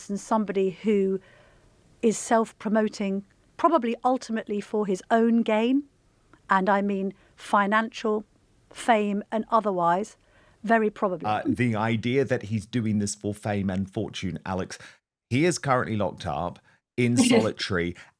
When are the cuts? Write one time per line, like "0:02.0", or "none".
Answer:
0:11.2